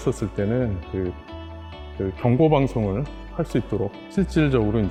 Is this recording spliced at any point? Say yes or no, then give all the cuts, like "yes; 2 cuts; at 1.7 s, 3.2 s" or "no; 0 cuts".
no; 0 cuts